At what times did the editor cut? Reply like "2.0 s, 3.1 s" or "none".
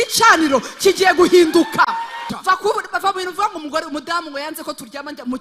2.3 s